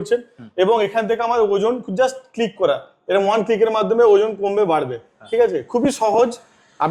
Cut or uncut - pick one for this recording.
uncut